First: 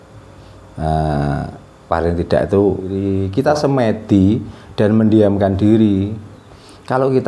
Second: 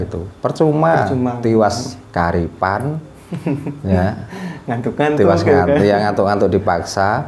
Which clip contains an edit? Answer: first; 1 cut; at 3.1 s

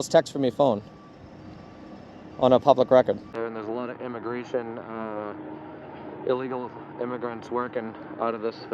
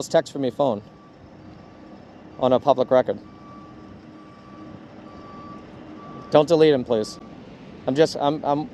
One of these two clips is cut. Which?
first; 1 cut; at 3.3 s

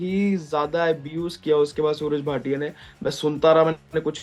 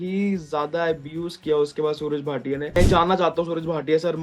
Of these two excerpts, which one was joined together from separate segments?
second; 1 cut; at 2.7 s

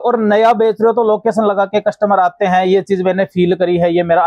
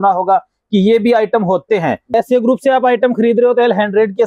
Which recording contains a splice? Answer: second; 1 cut; at 2.1 s

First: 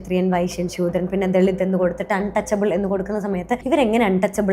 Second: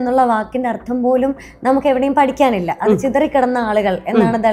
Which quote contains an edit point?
first; 1 cut; at 3.6 s

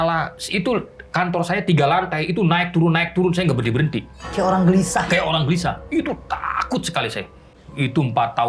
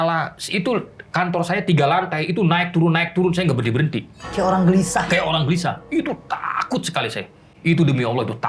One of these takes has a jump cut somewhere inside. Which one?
first; 1 cut; at 7.5 s

